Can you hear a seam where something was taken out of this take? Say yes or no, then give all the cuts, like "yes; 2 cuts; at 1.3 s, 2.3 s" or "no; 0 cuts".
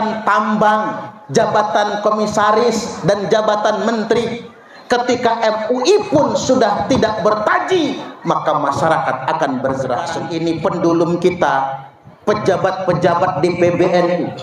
yes; 1 cut; at 10.2 s